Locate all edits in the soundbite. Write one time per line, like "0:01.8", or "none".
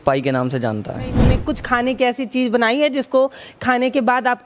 0:01.3